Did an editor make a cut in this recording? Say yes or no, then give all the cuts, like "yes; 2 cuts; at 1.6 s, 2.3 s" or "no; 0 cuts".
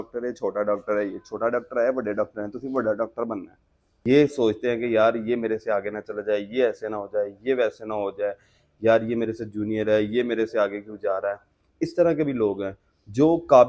yes; 1 cut; at 4.0 s